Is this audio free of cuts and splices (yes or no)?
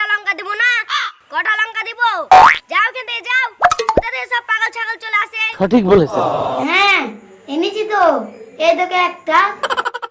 no